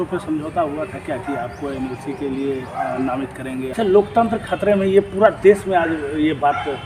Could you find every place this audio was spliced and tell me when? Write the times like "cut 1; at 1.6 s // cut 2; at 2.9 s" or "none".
cut 1; at 3.7 s